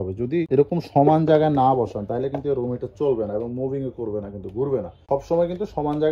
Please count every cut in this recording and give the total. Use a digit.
1